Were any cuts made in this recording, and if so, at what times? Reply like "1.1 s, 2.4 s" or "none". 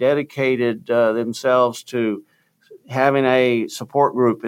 none

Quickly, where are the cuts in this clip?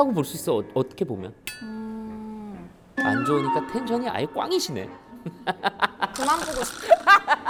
none

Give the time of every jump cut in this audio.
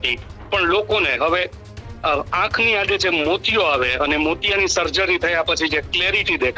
none

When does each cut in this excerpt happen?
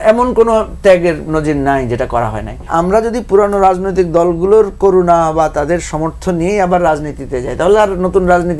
2.7 s

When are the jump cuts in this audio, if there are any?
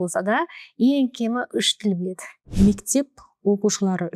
2.3 s

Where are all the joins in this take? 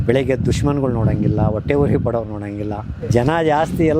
2.9 s

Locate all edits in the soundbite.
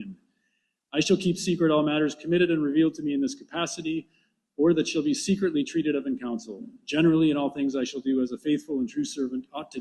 7.1 s

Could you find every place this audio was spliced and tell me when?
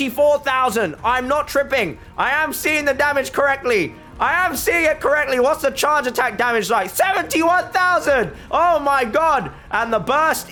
none

